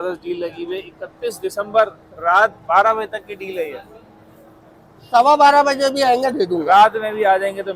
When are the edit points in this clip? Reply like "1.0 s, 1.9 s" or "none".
none